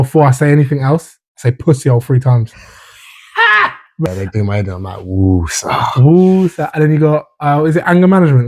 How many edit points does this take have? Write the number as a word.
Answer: one